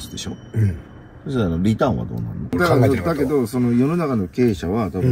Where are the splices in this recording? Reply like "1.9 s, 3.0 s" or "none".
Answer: 2.5 s